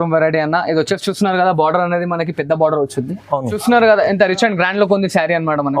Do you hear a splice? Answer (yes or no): yes